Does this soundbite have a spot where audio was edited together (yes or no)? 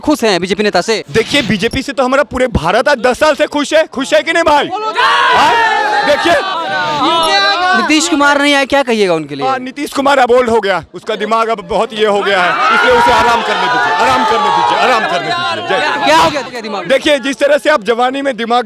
yes